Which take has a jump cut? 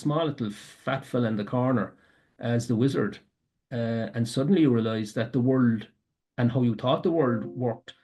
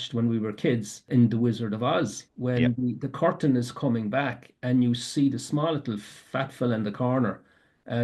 second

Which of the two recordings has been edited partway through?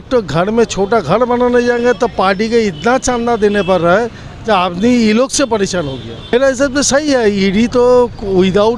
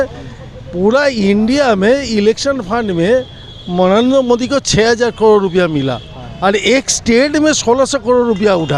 first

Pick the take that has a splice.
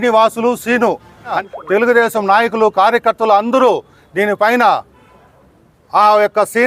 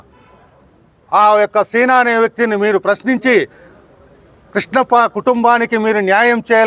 first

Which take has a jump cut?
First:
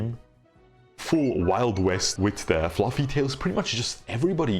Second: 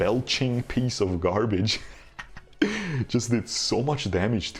first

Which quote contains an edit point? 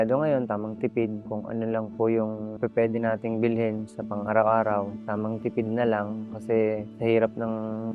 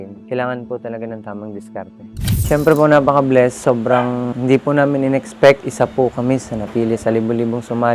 second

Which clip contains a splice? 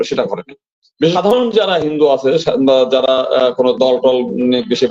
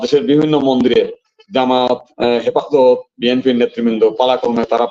first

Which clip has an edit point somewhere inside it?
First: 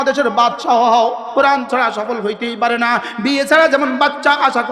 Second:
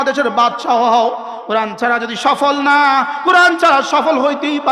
first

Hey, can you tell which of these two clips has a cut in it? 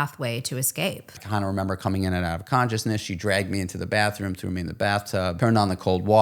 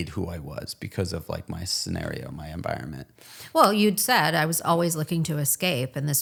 first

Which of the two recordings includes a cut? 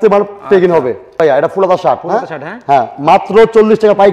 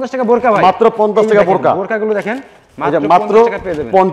first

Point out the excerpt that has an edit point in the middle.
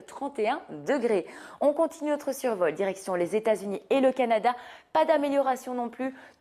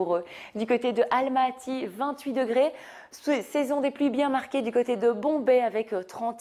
first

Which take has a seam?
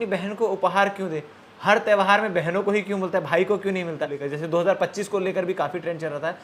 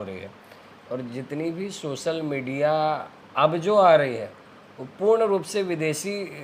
first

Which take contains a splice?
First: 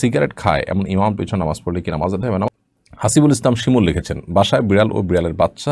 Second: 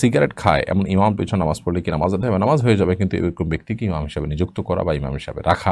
first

